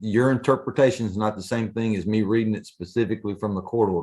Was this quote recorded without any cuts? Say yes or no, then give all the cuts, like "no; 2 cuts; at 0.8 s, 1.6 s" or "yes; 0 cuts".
yes; 0 cuts